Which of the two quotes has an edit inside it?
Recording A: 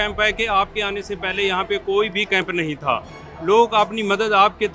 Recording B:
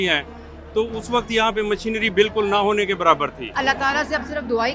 B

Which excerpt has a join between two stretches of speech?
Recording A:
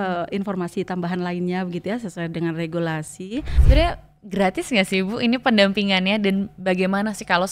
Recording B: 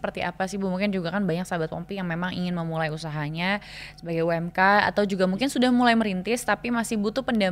A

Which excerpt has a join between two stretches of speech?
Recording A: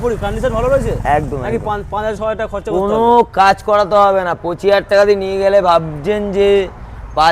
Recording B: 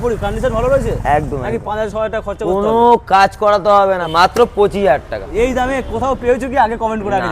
B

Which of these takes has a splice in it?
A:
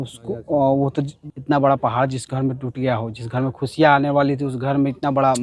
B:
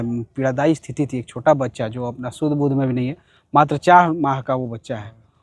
A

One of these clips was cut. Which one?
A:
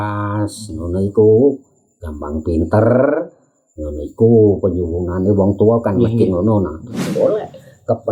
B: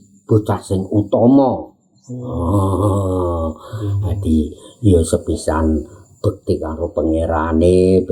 A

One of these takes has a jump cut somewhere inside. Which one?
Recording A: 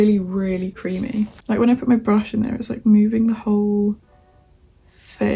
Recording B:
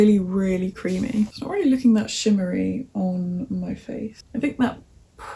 B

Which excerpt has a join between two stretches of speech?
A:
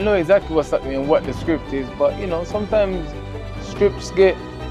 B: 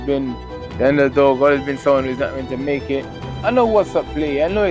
B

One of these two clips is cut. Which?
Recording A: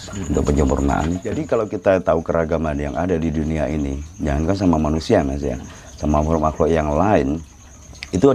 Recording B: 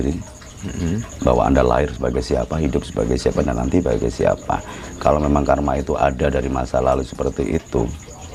A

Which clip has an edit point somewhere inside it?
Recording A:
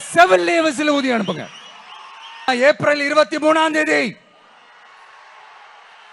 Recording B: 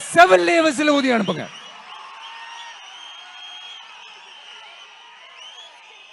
A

